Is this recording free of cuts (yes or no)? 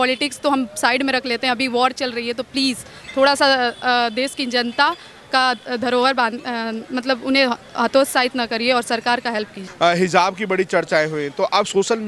yes